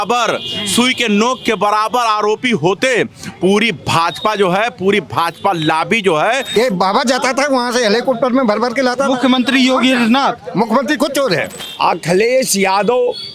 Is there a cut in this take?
yes; 2 cuts; at 6.4 s, 11.6 s

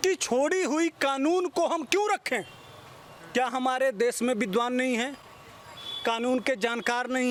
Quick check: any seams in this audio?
no; 0 cuts

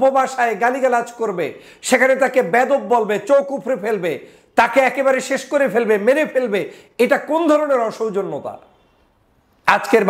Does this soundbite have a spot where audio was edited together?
no; 0 cuts

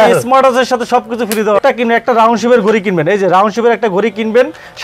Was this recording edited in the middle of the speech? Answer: yes; 1 cut; at 1.6 s

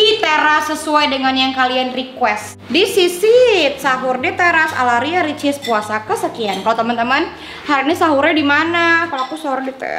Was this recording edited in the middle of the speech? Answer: no; 0 cuts

